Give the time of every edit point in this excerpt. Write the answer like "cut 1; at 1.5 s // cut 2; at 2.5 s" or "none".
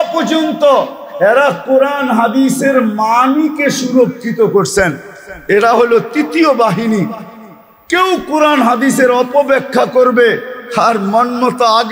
none